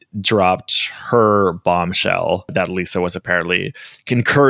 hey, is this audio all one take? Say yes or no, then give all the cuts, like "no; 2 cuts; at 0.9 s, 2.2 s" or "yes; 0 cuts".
no; 1 cut; at 2.5 s